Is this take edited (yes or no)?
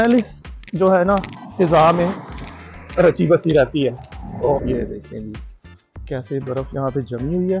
yes